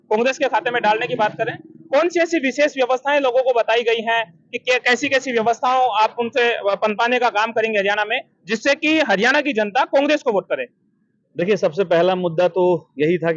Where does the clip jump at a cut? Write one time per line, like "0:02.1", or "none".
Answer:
none